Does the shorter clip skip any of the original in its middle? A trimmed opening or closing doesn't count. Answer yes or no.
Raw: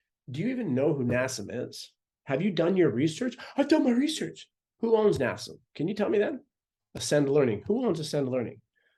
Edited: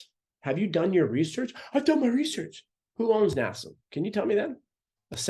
no